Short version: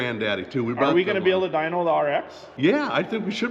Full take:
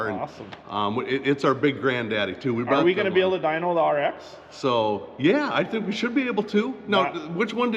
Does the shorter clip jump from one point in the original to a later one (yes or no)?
yes